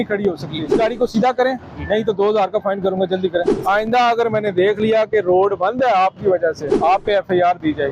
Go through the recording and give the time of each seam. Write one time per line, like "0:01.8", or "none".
0:00.7
0:03.5
0:06.7